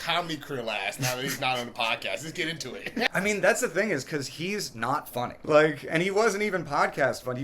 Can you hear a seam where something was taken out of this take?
yes; 2 cuts; at 3.1 s, 5.3 s

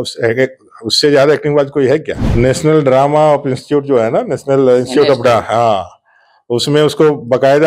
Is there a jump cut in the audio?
yes; 1 cut; at 2.2 s

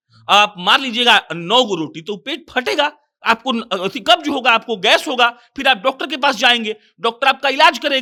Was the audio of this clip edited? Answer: no; 0 cuts

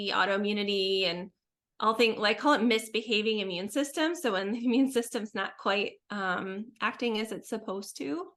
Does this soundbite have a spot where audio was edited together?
no; 0 cuts

